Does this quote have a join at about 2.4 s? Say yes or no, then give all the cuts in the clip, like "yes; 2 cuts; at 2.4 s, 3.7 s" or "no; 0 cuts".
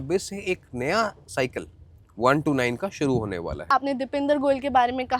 no; 1 cut; at 3.6 s